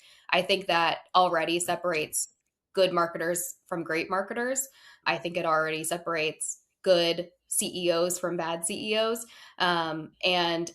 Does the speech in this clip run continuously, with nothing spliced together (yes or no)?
no